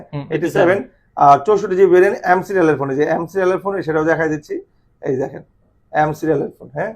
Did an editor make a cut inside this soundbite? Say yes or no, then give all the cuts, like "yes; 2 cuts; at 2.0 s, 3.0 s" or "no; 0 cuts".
no; 0 cuts